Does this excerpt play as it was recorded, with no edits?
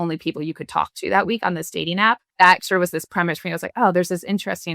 no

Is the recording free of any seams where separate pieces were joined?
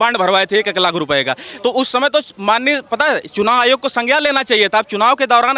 yes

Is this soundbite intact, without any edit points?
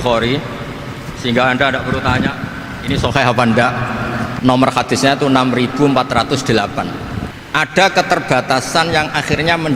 no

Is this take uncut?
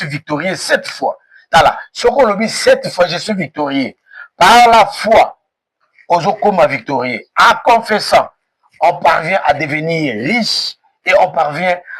yes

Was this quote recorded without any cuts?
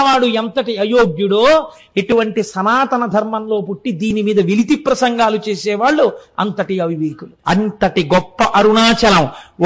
no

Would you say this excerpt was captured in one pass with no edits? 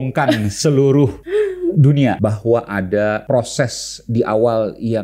no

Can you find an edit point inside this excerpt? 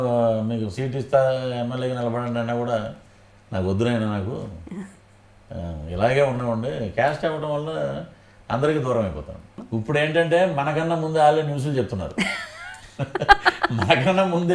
yes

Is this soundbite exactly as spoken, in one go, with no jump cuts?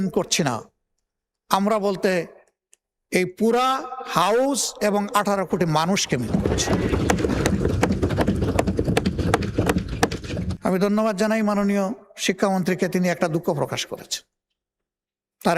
no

